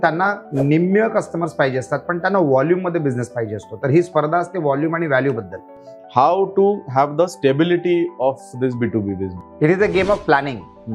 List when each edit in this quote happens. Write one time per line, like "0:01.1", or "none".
0:05.7
0:09.4

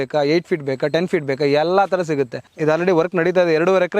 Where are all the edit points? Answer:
0:02.5

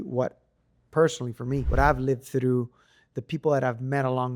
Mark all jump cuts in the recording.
0:01.7

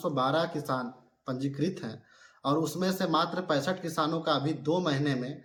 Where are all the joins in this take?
none

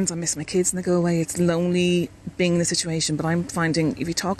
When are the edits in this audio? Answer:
0:01.3

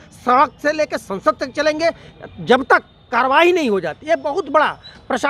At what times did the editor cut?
none

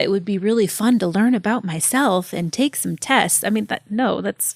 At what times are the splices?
none

